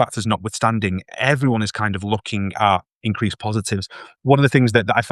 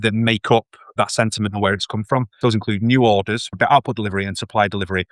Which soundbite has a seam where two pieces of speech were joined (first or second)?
second